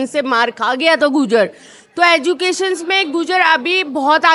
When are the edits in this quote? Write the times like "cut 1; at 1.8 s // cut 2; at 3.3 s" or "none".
none